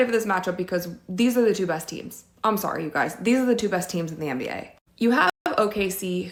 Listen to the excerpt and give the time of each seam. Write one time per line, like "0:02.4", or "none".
none